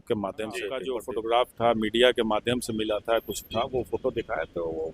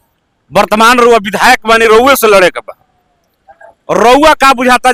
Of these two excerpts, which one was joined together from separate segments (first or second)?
first